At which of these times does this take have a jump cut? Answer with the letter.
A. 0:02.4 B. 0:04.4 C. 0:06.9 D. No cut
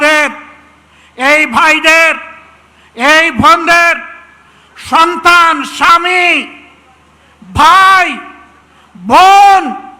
D